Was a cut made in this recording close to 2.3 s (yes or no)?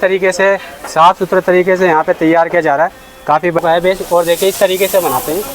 no